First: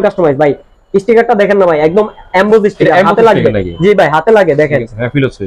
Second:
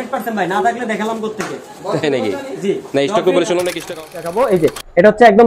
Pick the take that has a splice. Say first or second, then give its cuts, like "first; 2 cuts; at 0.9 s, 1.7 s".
second; 1 cut; at 4.3 s